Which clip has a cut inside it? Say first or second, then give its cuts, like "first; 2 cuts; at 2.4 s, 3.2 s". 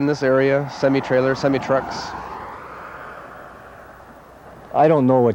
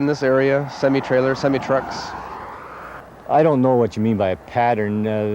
second; 1 cut; at 3.0 s